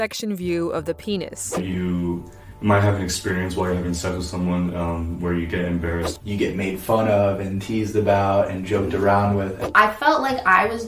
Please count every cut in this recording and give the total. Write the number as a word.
three